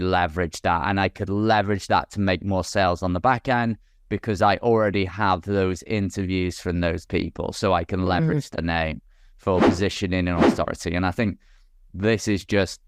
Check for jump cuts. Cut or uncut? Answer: uncut